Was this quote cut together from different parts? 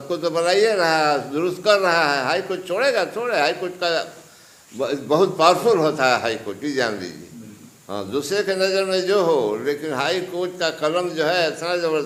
no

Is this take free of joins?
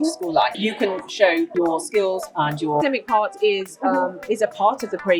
no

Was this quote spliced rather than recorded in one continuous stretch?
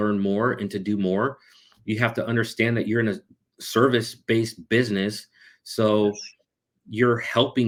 no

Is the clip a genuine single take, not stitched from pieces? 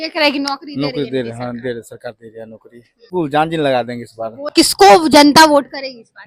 no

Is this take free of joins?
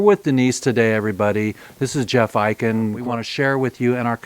no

